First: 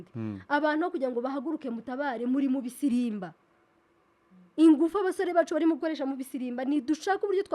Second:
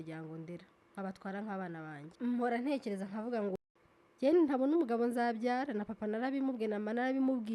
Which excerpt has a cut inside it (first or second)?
second